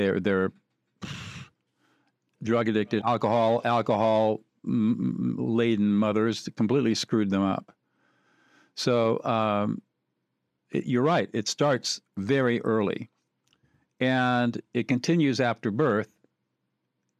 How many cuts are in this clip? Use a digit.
1